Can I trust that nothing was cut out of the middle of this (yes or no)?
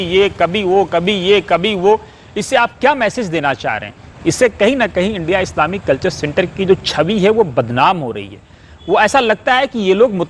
yes